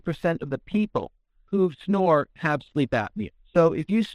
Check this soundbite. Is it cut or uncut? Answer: uncut